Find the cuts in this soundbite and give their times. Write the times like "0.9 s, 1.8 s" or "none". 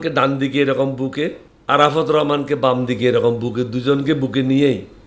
1.5 s